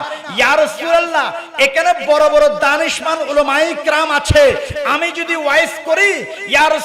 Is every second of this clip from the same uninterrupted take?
yes; 0 cuts

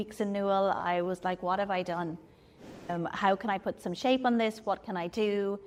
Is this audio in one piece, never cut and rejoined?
yes; 0 cuts

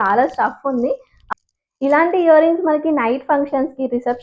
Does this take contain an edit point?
yes; 1 cut; at 1.1 s

